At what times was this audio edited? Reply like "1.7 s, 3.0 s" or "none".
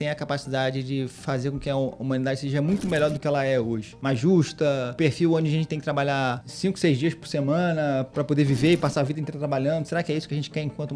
3.9 s, 4.9 s, 6.5 s